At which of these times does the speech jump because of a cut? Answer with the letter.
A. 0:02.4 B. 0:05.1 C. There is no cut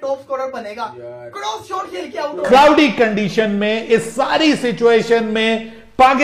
A